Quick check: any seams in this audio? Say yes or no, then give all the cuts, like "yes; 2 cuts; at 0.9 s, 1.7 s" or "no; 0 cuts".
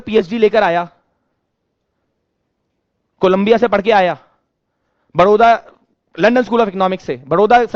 no; 0 cuts